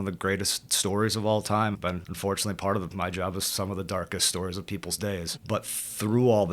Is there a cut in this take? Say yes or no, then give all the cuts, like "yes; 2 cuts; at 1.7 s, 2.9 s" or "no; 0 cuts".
yes; 1 cut; at 1.8 s